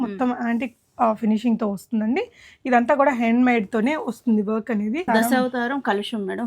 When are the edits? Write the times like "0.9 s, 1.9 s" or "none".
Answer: 5.0 s